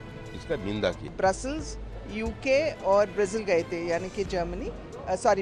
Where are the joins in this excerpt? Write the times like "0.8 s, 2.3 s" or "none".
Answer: 1.1 s